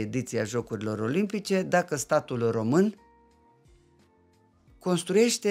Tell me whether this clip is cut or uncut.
uncut